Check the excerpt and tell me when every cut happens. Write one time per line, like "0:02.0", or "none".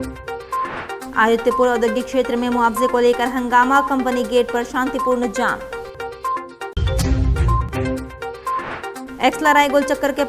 none